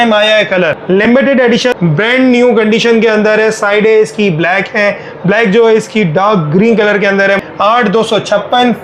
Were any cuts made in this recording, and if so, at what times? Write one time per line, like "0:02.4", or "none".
0:00.8
0:01.7
0:07.4